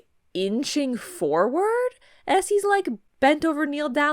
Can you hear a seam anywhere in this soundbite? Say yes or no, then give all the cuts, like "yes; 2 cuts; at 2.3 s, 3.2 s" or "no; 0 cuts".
yes; 1 cut; at 3.1 s